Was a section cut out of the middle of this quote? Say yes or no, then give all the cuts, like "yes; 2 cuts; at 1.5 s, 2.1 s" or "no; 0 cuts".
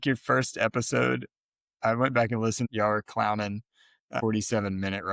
yes; 2 cuts; at 2.7 s, 4.2 s